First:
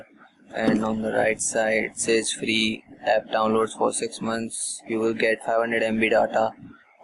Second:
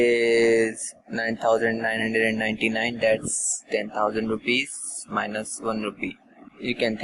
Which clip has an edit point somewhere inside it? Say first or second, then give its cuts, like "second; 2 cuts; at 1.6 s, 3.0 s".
second; 1 cut; at 1.2 s